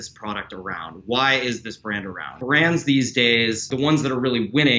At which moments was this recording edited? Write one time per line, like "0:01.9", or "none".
0:02.3
0:03.7